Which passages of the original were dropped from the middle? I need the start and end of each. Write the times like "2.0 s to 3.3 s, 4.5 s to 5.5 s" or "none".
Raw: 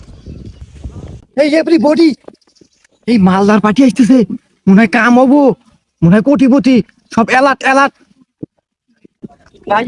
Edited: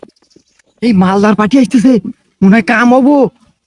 none